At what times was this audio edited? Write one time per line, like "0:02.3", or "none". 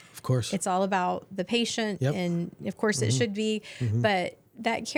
none